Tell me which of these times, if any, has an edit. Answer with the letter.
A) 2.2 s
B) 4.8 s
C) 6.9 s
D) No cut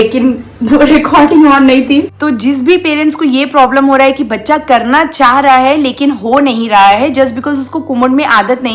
A